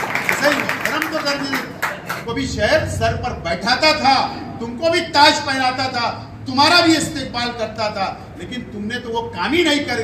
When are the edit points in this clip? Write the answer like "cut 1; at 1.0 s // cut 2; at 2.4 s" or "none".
cut 1; at 2.1 s